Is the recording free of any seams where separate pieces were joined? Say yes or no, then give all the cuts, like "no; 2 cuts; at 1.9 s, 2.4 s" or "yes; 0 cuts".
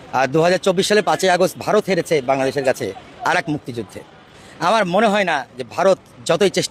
yes; 0 cuts